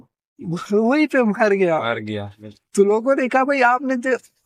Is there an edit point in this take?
no; 0 cuts

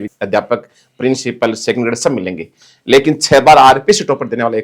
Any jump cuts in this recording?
no; 0 cuts

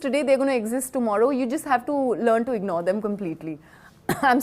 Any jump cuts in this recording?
no; 0 cuts

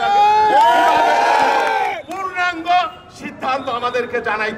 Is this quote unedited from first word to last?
yes; 0 cuts

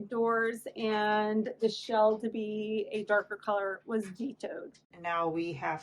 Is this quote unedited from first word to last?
no; 1 cut; at 4.9 s

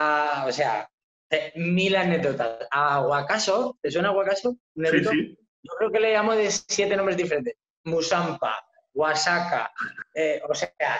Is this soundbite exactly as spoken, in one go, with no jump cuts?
yes; 0 cuts

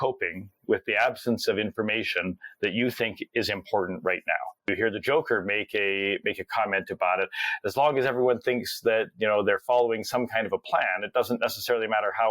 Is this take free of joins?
no; 1 cut; at 4.7 s

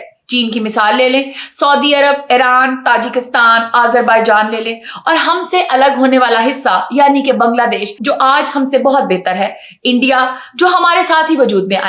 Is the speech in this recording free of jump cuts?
yes; 0 cuts

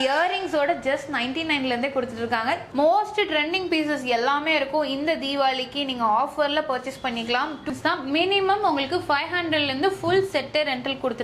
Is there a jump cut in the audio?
yes; 2 cuts; at 2.7 s, 7.7 s

